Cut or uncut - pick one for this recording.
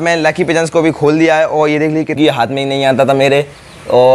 cut